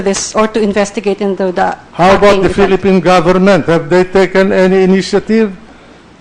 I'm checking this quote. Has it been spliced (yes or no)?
yes